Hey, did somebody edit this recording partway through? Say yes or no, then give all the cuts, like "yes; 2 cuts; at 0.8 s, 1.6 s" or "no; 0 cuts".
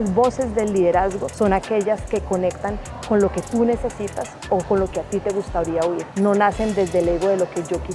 yes; 2 cuts; at 1.2 s, 6.1 s